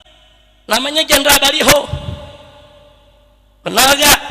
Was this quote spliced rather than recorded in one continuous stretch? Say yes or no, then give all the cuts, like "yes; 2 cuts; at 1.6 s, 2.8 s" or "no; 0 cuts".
no; 0 cuts